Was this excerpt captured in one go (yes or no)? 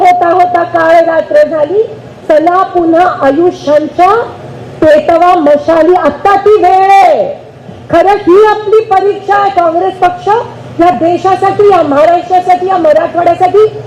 yes